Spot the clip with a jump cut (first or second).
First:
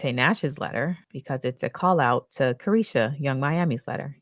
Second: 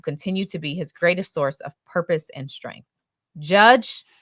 first